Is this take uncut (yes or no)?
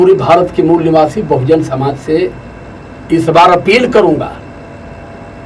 yes